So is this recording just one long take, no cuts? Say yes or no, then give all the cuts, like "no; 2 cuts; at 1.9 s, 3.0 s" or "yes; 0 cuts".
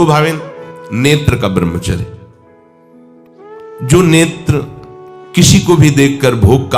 no; 2 cuts; at 2.1 s, 3.8 s